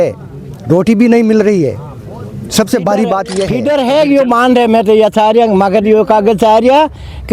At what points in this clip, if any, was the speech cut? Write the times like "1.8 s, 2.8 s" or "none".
3.5 s